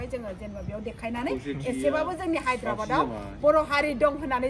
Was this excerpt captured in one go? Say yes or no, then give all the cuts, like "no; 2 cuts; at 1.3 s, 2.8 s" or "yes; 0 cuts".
yes; 0 cuts